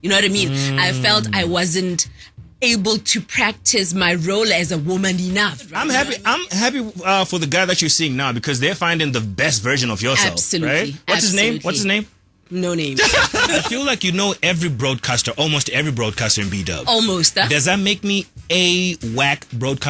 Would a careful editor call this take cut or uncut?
cut